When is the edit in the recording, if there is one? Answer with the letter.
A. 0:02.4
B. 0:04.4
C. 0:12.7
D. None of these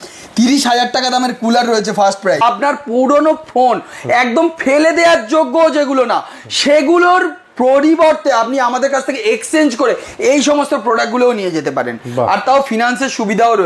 A